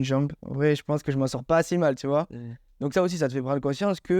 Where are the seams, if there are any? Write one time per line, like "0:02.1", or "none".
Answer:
none